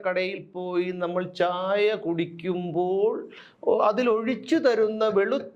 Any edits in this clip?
no; 0 cuts

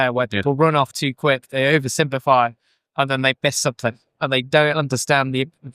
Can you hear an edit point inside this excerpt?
yes; 1 cut; at 4.1 s

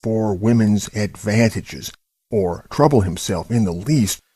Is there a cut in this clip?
yes; 1 cut; at 2.7 s

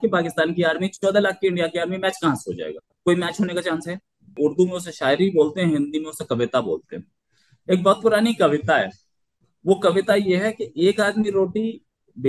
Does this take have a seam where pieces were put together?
yes; 1 cut; at 4.3 s

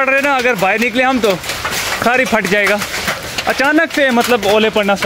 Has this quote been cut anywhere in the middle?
no; 0 cuts

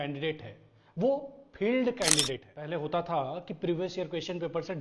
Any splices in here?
yes; 1 cut; at 2.5 s

